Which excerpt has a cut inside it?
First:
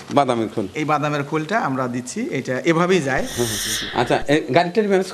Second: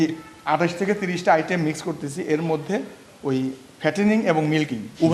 first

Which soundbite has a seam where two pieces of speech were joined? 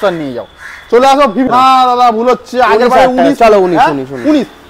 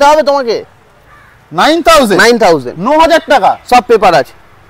first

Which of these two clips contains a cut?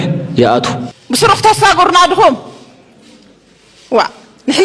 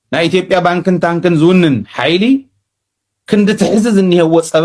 first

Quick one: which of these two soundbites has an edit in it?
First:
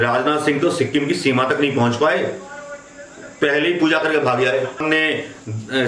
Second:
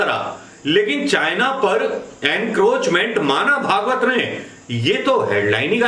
first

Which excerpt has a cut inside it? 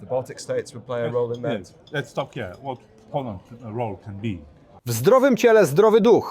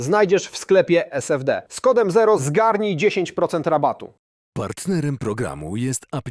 first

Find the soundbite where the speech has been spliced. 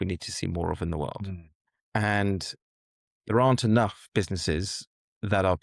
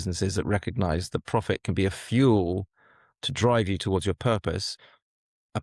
first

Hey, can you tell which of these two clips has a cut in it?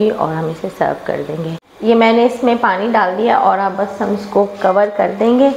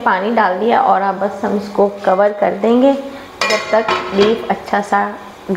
first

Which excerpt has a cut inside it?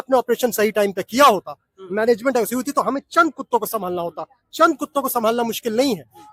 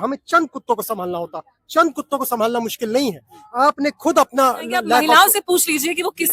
second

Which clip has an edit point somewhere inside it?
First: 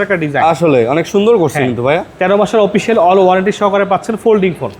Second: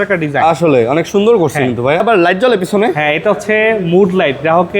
second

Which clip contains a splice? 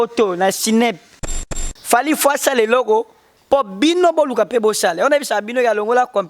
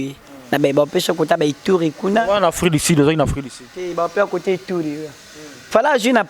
first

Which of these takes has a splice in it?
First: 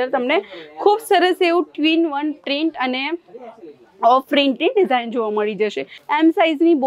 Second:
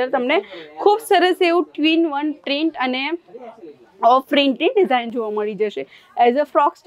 first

